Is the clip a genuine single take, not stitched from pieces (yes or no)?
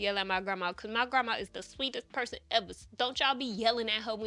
yes